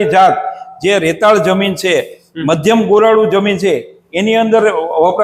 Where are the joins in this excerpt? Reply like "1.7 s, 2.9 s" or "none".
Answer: none

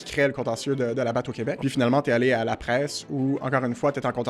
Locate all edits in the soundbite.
1.5 s

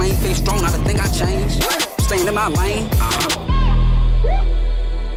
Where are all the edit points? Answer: none

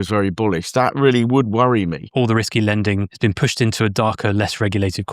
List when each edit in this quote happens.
2.0 s, 3.1 s

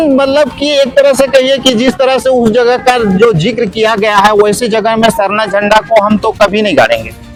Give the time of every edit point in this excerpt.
none

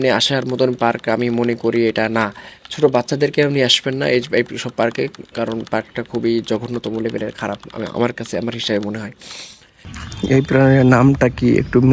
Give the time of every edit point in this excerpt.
9.9 s

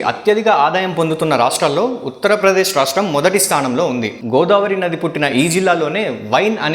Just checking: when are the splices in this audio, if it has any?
4.2 s

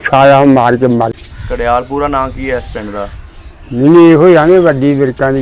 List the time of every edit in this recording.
1.2 s

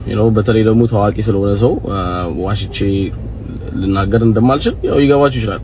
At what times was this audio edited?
none

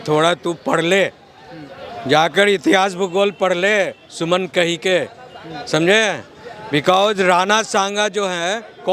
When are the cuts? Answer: none

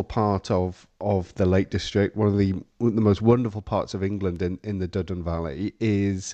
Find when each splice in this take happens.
none

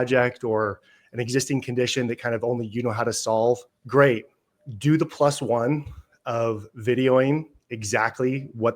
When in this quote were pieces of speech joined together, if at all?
3.7 s

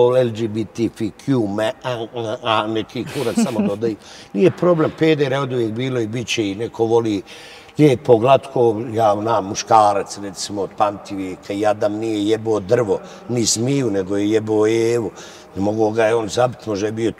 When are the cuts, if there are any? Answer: none

